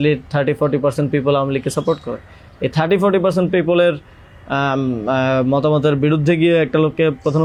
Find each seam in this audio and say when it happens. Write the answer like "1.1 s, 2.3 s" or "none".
none